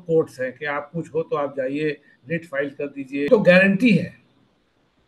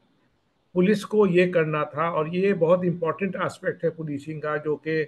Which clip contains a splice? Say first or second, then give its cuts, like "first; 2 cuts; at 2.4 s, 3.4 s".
first; 1 cut; at 3.3 s